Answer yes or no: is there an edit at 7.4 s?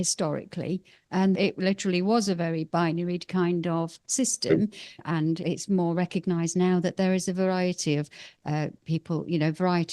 no